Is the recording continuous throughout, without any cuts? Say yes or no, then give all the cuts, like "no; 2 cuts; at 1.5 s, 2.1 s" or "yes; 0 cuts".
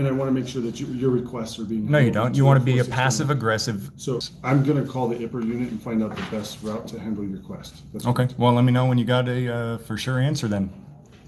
no; 1 cut; at 4.3 s